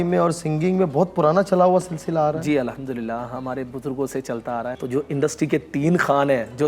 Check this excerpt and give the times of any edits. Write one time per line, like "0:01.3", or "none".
0:04.8